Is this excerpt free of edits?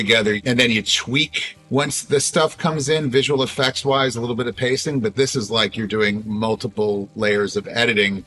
yes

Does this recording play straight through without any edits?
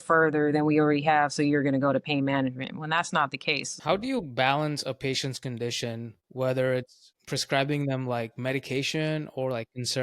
no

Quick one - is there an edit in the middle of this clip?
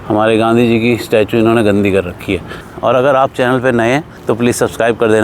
no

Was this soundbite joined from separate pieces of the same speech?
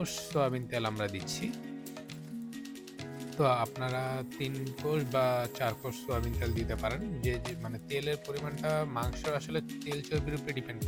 no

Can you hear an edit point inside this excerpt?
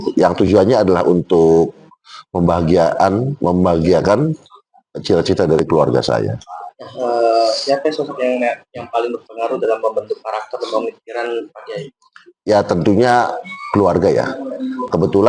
no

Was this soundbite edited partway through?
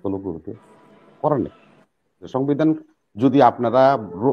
yes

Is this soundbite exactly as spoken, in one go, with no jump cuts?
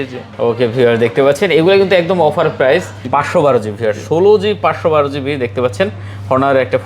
no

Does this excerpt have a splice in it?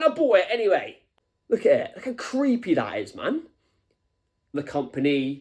yes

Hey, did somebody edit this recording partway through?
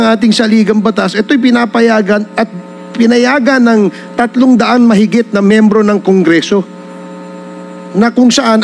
no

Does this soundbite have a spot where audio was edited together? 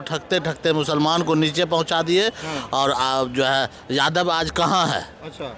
no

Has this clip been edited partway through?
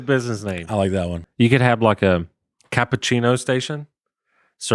yes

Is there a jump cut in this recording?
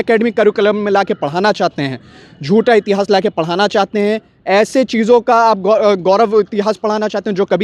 no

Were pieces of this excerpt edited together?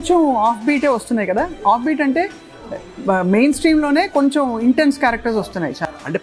no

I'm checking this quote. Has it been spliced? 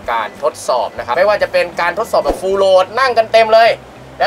yes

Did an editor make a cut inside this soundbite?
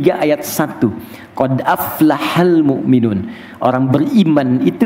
no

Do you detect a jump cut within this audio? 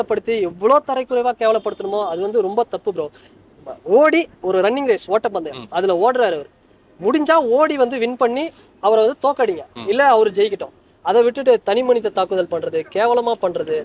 no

